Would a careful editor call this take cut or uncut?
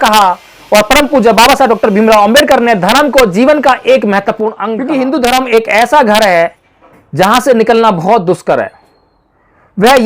cut